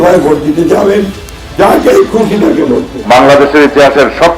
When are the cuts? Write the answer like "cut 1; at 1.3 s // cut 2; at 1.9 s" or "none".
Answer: cut 1; at 2.9 s